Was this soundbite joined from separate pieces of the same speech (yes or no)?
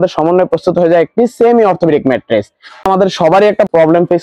yes